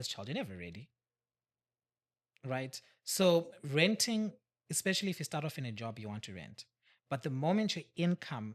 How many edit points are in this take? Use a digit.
0